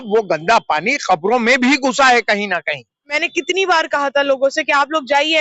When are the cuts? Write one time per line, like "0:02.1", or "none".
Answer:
0:03.2